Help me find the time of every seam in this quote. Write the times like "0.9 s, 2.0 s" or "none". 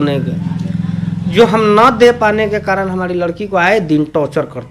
none